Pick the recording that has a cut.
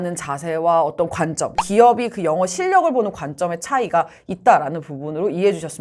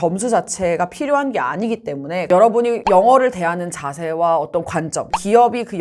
second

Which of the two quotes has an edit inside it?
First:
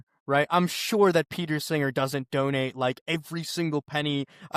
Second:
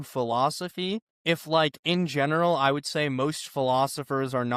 second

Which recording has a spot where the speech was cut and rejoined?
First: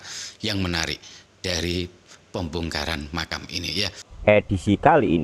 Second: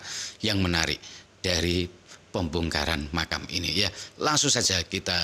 first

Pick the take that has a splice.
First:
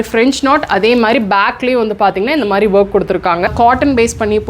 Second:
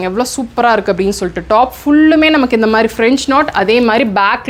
first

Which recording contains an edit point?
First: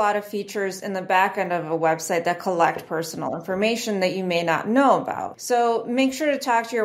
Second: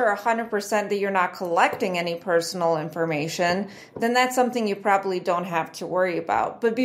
first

